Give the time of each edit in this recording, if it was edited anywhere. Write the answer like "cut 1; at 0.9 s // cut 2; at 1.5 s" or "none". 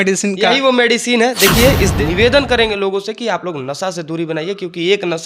cut 1; at 1.9 s